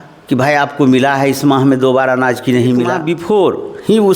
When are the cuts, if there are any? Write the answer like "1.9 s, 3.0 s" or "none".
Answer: 3.2 s